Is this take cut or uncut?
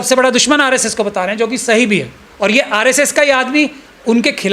cut